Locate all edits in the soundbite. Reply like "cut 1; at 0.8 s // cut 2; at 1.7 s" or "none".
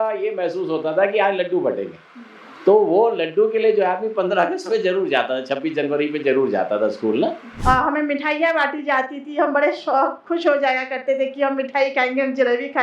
cut 1; at 7.6 s